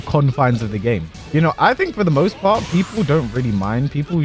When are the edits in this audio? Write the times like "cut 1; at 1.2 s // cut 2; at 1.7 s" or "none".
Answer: cut 1; at 1.1 s